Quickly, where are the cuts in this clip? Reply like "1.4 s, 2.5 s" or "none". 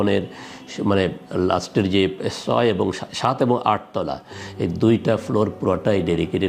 none